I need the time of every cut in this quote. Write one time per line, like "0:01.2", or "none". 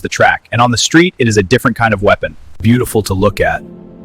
0:02.5